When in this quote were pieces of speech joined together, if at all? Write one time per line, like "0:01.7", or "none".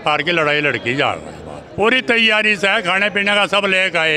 0:01.6